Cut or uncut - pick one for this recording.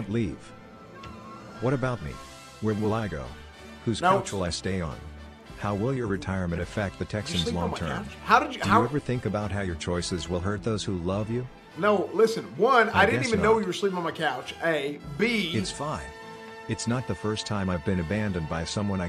uncut